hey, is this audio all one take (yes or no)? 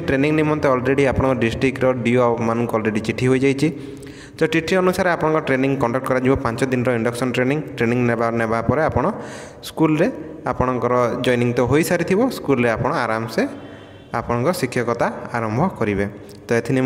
yes